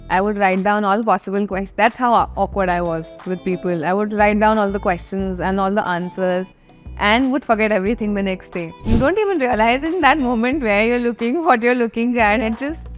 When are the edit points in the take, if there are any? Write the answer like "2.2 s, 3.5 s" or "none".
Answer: 8.8 s